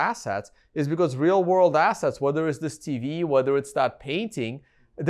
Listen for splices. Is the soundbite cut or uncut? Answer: uncut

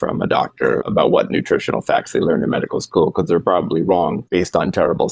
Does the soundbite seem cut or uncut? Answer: cut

